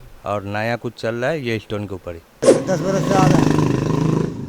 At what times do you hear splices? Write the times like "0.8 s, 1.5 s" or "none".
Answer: 2.5 s

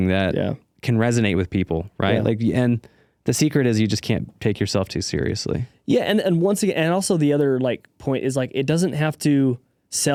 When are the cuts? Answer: none

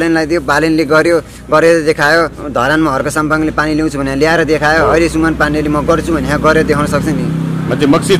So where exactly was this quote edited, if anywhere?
2.4 s

